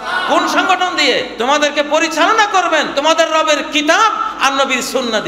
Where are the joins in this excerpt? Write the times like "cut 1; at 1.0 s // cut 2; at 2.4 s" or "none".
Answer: cut 1; at 1.3 s // cut 2; at 2.9 s